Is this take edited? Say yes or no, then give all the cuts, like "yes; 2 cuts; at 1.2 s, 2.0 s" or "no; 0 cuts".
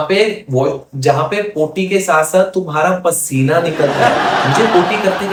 no; 0 cuts